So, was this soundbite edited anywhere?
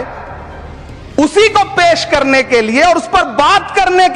no; 0 cuts

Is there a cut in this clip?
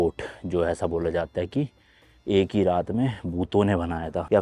no; 0 cuts

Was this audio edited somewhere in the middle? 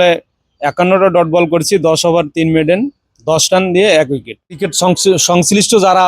yes; 1 cut; at 4.7 s

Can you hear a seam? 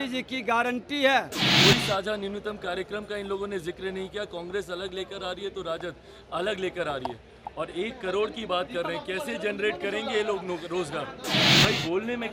yes; 2 cuts; at 1.4 s, 11.5 s

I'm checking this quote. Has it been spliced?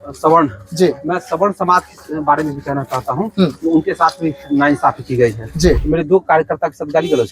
yes; 1 cut; at 5.8 s

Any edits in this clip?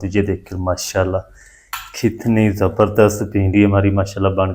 no; 0 cuts

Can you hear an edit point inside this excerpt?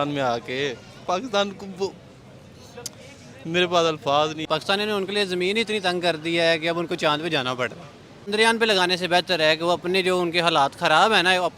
yes; 2 cuts; at 4.4 s, 8.3 s

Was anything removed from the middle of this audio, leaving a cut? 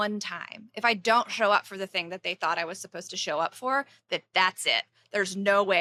no; 0 cuts

